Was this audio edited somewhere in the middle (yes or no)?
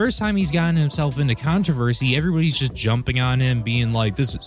no